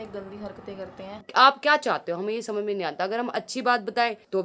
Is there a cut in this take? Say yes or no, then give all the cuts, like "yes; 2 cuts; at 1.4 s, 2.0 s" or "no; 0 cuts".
yes; 1 cut; at 1.2 s